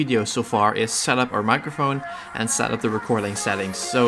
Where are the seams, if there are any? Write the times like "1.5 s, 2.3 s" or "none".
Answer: none